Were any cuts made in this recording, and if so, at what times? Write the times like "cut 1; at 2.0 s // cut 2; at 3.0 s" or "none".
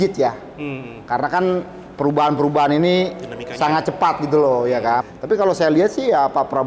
cut 1; at 5.1 s